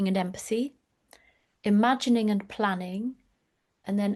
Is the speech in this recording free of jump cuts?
yes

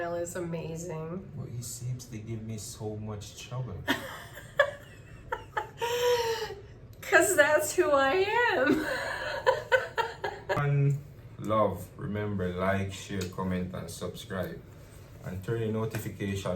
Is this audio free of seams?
no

